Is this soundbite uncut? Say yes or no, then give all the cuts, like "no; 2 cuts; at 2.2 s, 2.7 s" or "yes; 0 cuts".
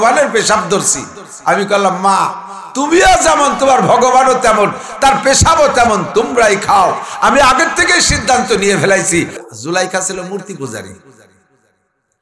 no; 1 cut; at 9.4 s